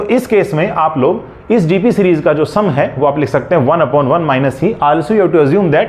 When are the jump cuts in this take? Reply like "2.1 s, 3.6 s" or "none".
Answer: none